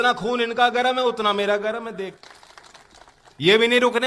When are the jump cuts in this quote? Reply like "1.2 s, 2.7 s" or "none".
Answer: 2.2 s